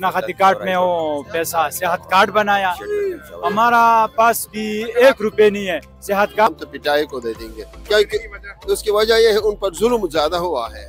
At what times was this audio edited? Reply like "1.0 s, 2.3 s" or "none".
6.5 s